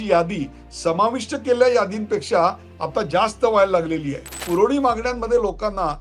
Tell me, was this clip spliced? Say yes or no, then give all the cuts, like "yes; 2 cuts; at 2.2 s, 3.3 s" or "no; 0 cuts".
yes; 1 cut; at 4.4 s